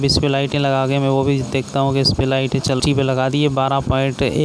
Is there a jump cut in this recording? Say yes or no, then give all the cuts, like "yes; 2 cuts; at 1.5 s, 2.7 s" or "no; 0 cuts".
yes; 1 cut; at 2.8 s